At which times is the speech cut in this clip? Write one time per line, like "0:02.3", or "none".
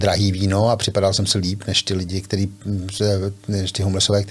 none